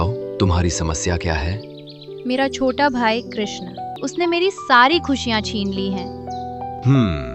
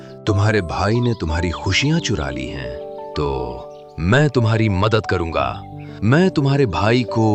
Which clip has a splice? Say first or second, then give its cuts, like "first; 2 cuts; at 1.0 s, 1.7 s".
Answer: first; 1 cut; at 3.9 s